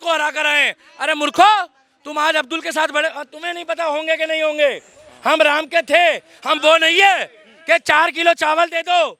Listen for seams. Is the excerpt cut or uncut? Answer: uncut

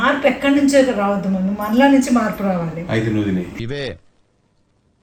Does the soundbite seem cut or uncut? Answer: uncut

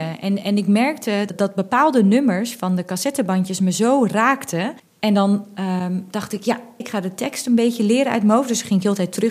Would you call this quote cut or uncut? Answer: cut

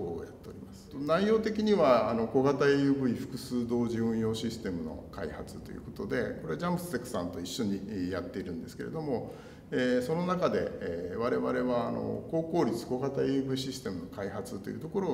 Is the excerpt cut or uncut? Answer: uncut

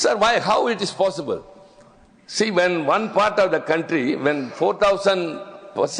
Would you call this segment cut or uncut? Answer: uncut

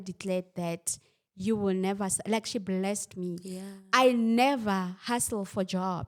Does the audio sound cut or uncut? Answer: uncut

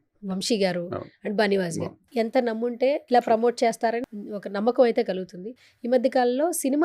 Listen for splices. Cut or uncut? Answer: cut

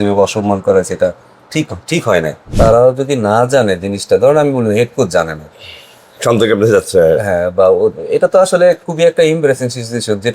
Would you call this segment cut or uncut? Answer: cut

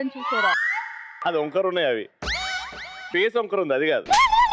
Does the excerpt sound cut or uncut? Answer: uncut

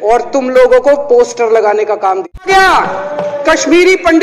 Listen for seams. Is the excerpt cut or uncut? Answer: cut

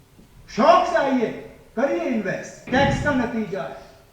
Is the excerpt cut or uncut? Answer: cut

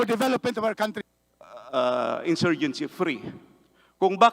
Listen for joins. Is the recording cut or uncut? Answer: cut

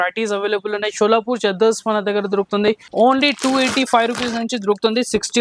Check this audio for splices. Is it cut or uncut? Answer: cut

